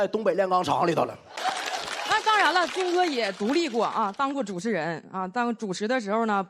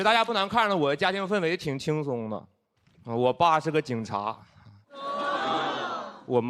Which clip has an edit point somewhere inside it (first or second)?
first